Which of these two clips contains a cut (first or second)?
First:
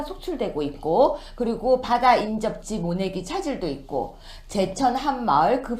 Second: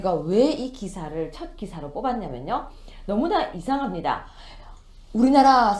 first